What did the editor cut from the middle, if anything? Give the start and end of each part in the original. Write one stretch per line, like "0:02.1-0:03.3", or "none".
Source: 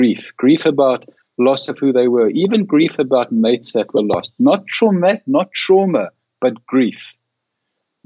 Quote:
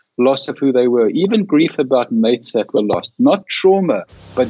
0:04.7-0:05.5

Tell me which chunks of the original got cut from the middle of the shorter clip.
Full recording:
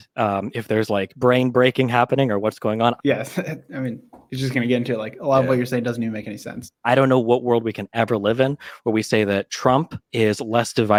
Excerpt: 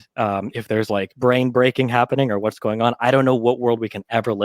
0:02.8-0:06.7

